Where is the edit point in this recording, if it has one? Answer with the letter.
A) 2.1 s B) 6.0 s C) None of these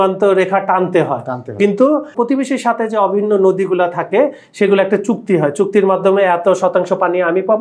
A